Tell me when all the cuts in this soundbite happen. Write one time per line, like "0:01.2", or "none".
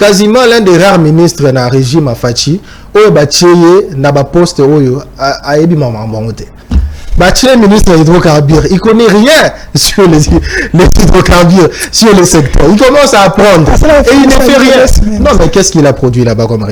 none